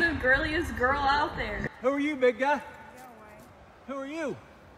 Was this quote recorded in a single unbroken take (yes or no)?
no